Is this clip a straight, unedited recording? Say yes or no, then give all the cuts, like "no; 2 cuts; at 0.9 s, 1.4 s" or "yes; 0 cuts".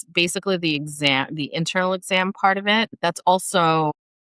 no; 1 cut; at 2.9 s